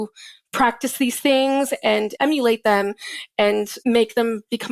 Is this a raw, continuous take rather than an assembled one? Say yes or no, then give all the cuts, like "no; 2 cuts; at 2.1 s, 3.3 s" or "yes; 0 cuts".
no; 2 cuts; at 2.1 s, 3.7 s